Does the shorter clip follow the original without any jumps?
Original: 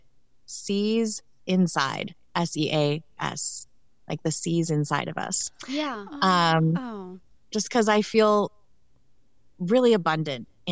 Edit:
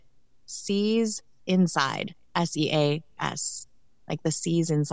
yes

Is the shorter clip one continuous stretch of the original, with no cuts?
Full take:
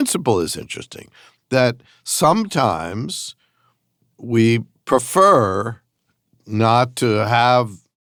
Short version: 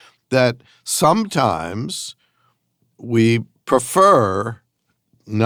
yes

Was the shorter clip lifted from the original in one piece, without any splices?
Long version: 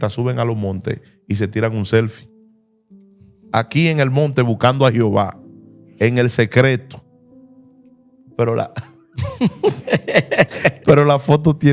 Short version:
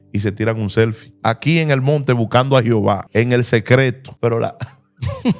no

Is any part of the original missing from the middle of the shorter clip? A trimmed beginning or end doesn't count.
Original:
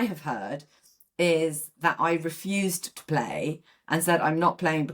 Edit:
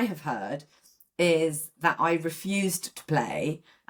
no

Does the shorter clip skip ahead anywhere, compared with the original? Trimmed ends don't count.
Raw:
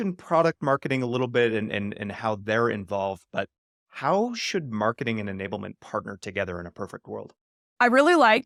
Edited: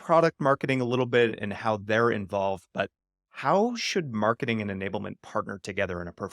yes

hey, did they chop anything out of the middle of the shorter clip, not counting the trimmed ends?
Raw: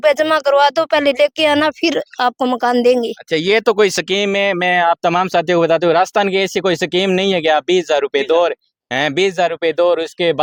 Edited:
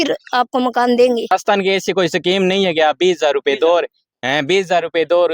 yes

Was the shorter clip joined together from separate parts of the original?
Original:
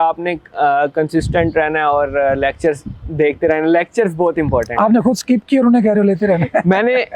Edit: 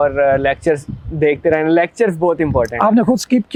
no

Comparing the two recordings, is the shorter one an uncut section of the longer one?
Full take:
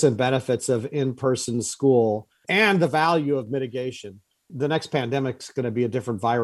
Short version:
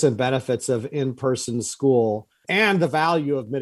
yes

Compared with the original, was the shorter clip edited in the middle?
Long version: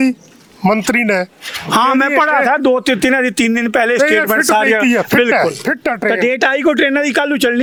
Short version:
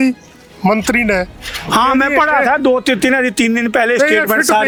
no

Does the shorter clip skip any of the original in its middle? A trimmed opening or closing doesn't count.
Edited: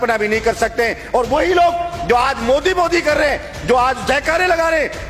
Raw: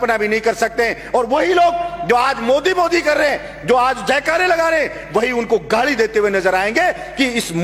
no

